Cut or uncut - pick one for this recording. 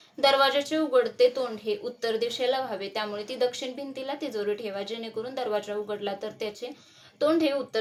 uncut